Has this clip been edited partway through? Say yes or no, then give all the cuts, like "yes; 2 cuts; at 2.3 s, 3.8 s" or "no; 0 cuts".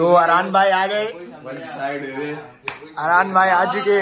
no; 0 cuts